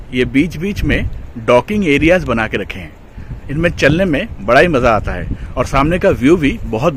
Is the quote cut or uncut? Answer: uncut